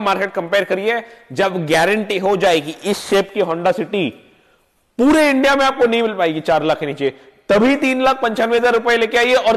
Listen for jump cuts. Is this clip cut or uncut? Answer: uncut